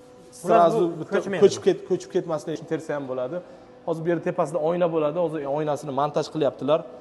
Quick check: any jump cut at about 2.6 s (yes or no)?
yes